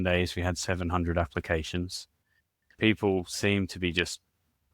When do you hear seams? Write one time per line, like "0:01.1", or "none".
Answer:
0:02.7